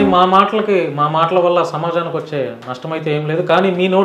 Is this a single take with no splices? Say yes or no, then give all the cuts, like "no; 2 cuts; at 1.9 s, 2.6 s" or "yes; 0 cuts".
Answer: yes; 0 cuts